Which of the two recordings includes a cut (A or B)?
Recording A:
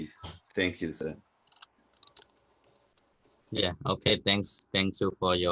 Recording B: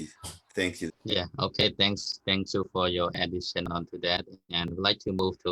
B